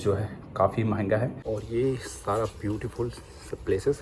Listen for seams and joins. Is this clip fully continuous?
no; 1 cut; at 1.4 s

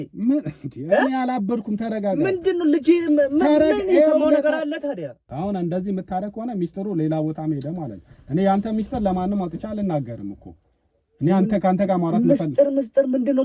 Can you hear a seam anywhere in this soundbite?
yes; 1 cut; at 5.2 s

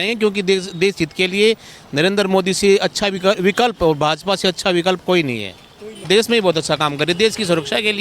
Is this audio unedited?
no; 1 cut; at 6.1 s

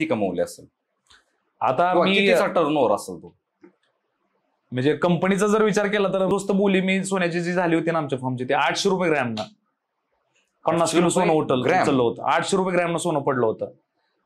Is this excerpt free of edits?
no; 1 cut; at 6.3 s

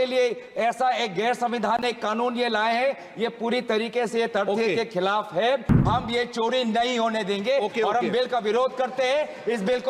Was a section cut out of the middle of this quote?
yes; 1 cut; at 5.9 s

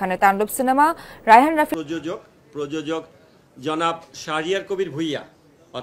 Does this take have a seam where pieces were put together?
yes; 1 cut; at 1.8 s

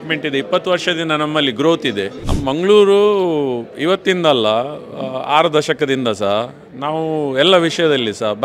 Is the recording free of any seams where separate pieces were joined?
no; 1 cut; at 2.2 s

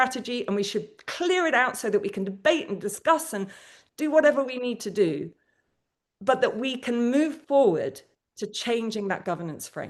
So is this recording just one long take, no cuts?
yes; 0 cuts

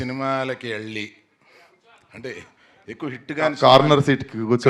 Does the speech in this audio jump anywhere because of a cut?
no; 0 cuts

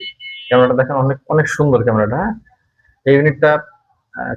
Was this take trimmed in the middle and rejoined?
no; 0 cuts

